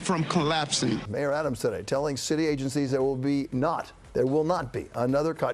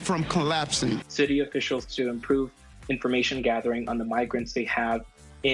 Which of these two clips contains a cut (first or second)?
first